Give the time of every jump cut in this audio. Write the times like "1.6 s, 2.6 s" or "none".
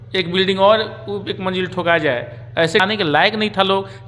2.8 s